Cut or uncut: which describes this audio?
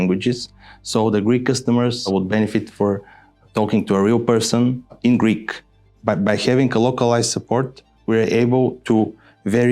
cut